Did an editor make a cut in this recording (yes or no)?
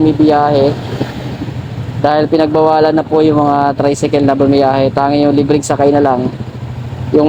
no